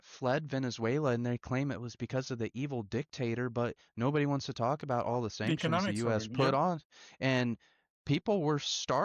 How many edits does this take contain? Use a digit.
0